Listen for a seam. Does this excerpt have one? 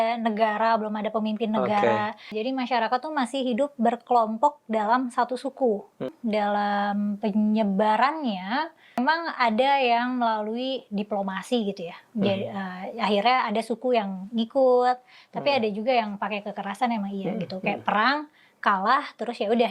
yes; 3 cuts; at 2.3 s, 6.1 s, 9.0 s

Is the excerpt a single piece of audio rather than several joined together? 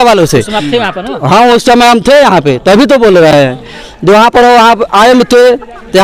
yes; 0 cuts

